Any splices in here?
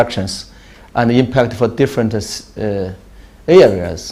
no; 0 cuts

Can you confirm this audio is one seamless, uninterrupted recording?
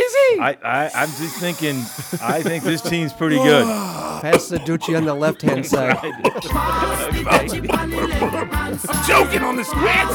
yes; 0 cuts

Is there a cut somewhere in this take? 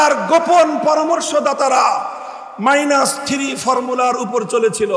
no; 0 cuts

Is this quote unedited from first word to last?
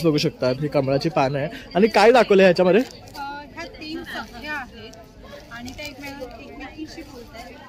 yes; 0 cuts

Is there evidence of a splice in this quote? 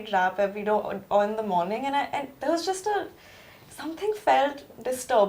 no; 0 cuts

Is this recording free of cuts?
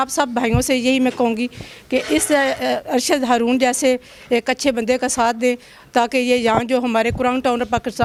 yes; 0 cuts

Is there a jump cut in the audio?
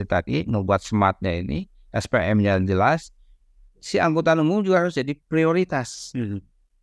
no; 0 cuts

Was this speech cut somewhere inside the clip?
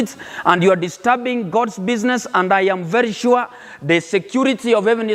no; 0 cuts

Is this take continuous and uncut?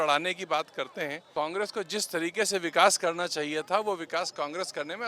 no; 1 cut; at 1.2 s

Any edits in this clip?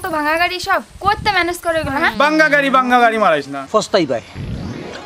yes; 2 cuts; at 2.1 s, 3.6 s

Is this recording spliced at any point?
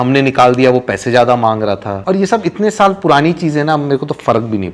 yes; 1 cut; at 1.9 s

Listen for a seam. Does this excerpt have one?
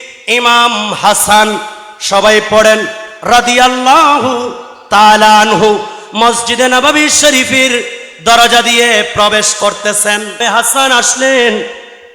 yes; 1 cut; at 10.4 s

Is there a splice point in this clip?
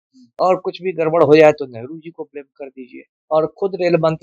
yes; 1 cut; at 3.1 s

